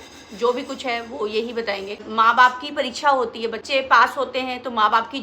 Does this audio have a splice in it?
yes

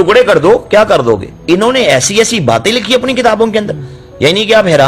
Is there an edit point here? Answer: yes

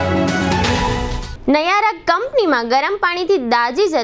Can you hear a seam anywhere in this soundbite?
no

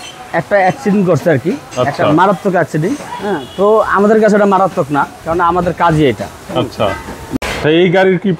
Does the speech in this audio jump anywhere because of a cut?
yes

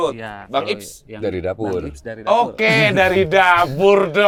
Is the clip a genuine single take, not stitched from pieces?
yes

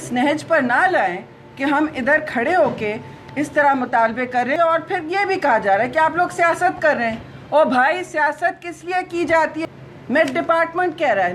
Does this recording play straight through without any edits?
no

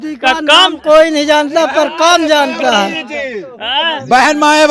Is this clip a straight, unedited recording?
yes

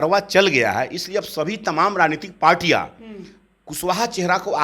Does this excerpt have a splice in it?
no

